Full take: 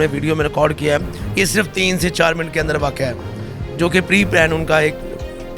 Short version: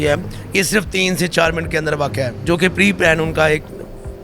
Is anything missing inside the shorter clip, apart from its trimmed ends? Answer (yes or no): yes